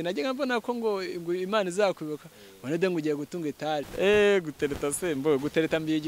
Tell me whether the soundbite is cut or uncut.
cut